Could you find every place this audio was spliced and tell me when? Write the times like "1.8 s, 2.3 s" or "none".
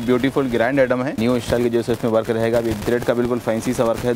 1.2 s, 2.8 s

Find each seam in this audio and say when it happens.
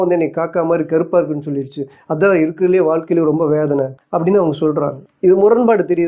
4.0 s, 5.0 s

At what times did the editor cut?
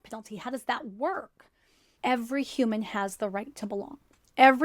1.9 s

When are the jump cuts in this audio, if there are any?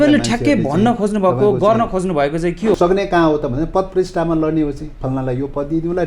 2.8 s

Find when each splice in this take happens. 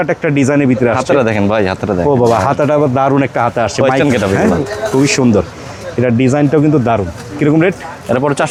none

